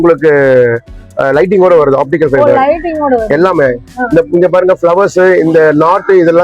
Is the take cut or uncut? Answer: uncut